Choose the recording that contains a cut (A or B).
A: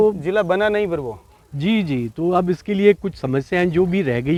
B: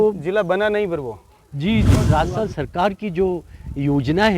B